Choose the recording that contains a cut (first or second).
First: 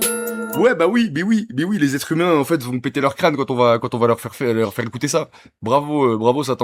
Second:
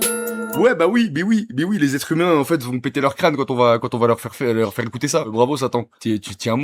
second